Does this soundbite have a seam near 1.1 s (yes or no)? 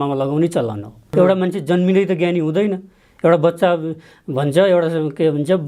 yes